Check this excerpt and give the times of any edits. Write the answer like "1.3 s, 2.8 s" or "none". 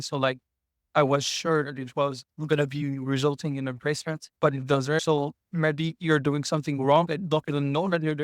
5.0 s